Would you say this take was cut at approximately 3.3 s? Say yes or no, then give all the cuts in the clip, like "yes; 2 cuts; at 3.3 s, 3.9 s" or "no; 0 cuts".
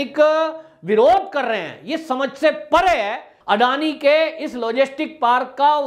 yes; 1 cut; at 3.3 s